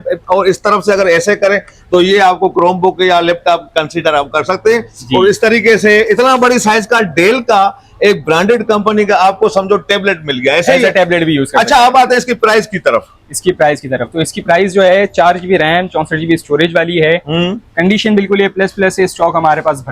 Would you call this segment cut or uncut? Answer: uncut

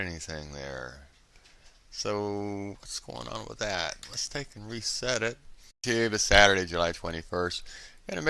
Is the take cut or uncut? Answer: uncut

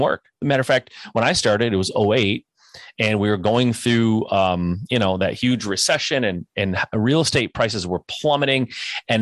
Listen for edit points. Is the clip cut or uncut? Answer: uncut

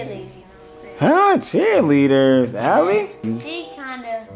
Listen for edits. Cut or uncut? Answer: cut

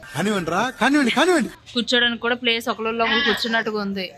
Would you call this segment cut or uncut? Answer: cut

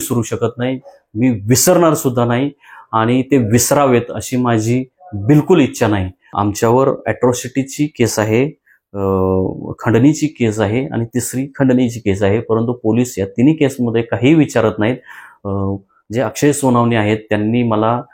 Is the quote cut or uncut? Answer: cut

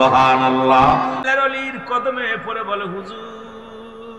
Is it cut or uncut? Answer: cut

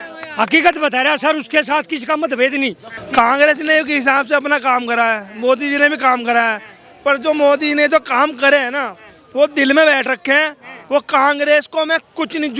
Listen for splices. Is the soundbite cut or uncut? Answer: cut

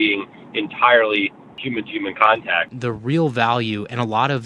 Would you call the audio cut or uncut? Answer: cut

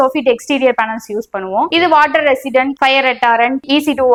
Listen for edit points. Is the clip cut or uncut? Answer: uncut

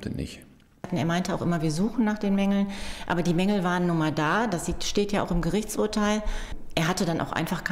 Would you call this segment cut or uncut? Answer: cut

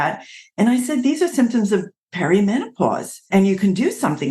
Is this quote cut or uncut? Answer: cut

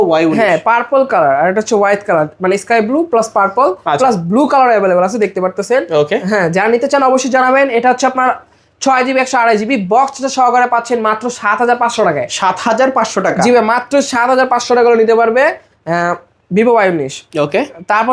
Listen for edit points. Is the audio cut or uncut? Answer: uncut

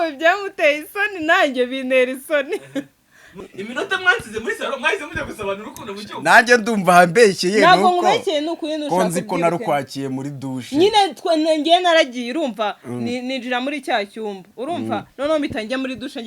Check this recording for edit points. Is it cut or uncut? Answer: cut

